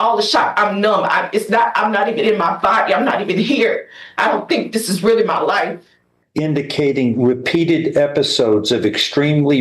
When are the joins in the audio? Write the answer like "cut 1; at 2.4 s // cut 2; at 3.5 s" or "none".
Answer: cut 1; at 6.3 s